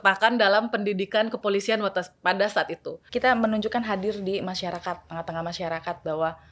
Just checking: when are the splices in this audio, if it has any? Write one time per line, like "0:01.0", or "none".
0:03.1